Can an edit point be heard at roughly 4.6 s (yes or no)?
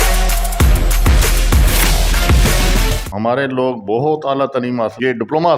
no